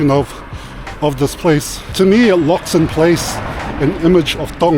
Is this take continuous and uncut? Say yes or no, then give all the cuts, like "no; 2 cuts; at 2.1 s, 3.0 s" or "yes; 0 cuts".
no; 1 cut; at 1.8 s